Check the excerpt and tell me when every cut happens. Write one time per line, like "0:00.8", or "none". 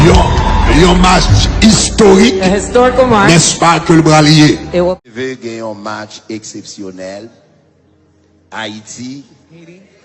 0:05.0